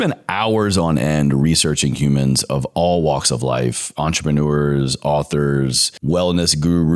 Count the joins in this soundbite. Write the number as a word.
one